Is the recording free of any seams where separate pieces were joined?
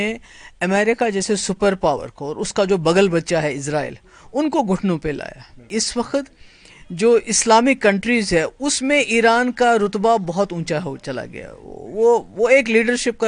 no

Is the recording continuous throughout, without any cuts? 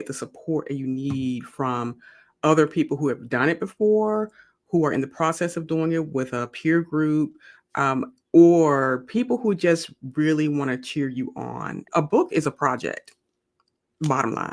no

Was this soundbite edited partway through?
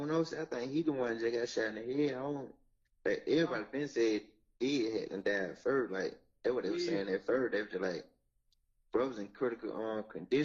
yes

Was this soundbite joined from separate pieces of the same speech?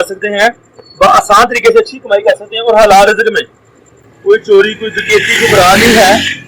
no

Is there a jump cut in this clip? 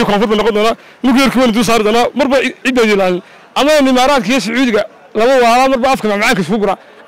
no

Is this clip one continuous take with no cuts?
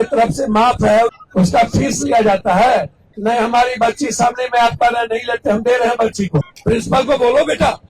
no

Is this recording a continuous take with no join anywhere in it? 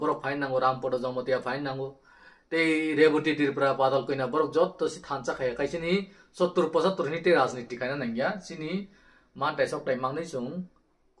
yes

